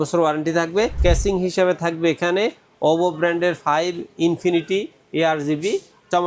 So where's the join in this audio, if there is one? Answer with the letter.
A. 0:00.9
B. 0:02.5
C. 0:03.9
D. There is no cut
A